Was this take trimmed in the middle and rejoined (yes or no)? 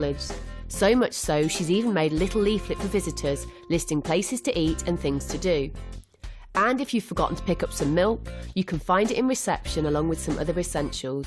yes